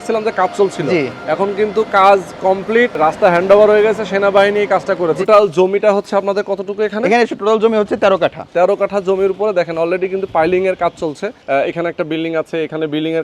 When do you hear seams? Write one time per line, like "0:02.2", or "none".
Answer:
0:02.9
0:05.2
0:07.3
0:08.4
0:11.3